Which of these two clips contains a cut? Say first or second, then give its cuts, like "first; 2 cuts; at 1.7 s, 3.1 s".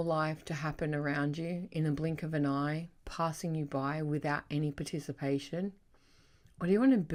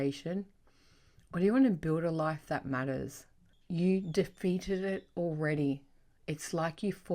second; 1 cut; at 3.5 s